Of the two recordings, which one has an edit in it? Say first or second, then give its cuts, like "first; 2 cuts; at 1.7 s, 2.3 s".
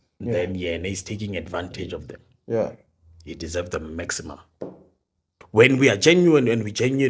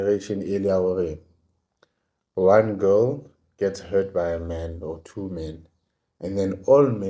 first; 1 cut; at 5.4 s